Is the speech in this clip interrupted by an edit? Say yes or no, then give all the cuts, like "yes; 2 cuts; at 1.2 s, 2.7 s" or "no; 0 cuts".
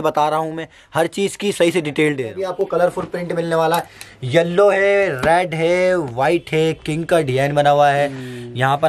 yes; 1 cut; at 2.4 s